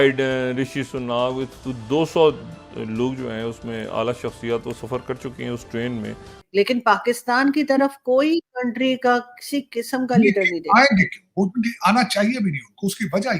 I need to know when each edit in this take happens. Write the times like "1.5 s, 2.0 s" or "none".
6.4 s